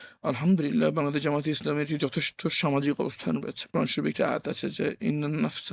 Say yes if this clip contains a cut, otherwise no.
yes